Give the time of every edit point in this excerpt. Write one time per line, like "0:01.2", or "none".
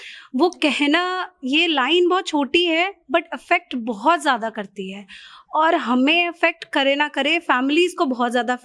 none

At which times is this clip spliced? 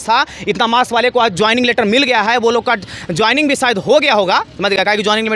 none

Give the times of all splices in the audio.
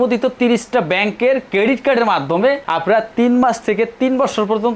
none

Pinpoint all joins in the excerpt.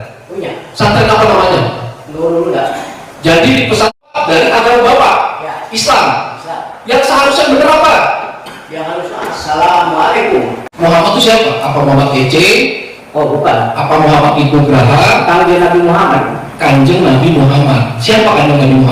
0:04.0
0:10.6

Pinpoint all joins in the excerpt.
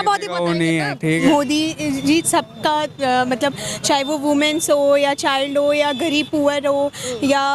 0:01.2

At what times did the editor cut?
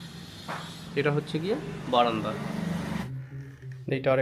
0:03.0

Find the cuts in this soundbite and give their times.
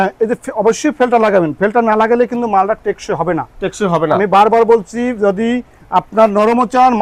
none

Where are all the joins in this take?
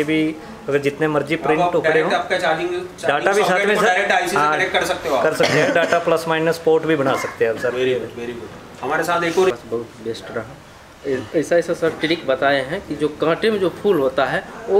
0:09.5

